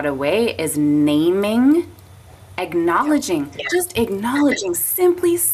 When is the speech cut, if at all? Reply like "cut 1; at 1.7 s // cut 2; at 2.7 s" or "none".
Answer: none